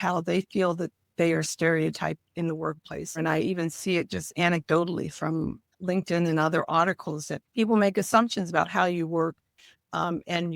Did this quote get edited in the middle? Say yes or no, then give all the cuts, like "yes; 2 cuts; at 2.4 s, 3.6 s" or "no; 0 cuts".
yes; 3 cuts; at 3.2 s, 5.7 s, 7.3 s